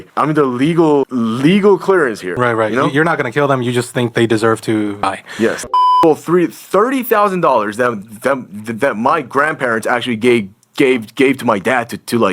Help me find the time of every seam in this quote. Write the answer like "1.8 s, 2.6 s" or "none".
5.7 s

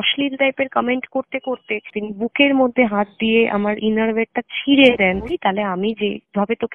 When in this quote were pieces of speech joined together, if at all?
5.3 s

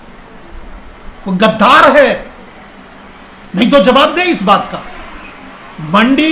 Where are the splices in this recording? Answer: none

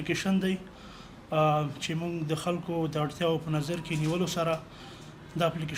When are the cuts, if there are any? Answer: none

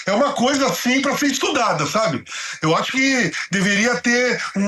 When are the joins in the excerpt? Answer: none

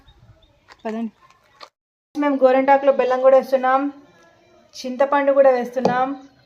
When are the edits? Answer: 1.8 s

